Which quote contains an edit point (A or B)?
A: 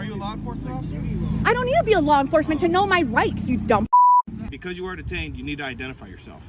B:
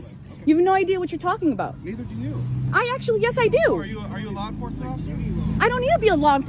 A